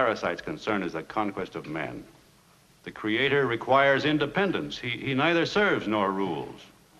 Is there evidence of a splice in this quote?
no; 0 cuts

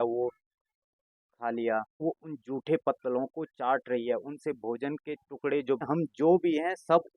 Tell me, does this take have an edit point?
yes; 2 cuts; at 2.0 s, 5.8 s

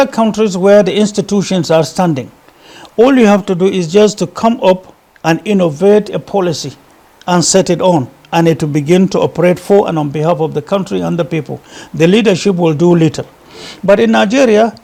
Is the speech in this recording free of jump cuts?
yes; 0 cuts

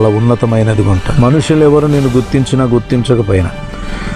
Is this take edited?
yes; 1 cut; at 1.1 s

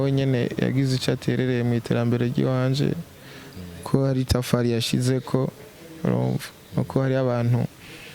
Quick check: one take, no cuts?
yes; 0 cuts

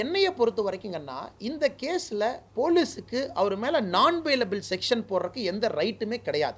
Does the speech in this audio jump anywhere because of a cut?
no; 0 cuts

